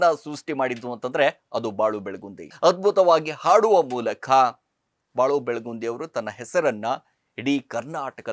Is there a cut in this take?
yes; 1 cut; at 2.5 s

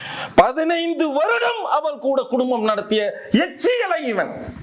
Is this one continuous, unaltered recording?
yes; 0 cuts

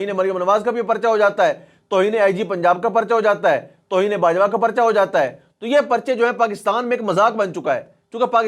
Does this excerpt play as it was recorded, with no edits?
yes; 0 cuts

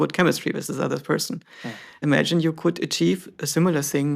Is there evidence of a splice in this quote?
yes; 1 cut; at 2.0 s

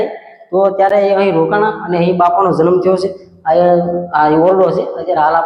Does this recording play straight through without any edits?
yes; 0 cuts

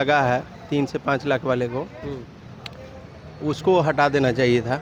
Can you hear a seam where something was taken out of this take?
no; 0 cuts

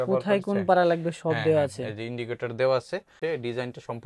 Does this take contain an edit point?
yes; 1 cut; at 3.1 s

